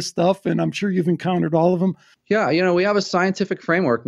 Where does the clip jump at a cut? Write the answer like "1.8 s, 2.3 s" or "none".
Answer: 2.1 s